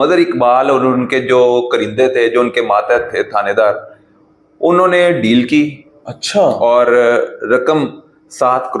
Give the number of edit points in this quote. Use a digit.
0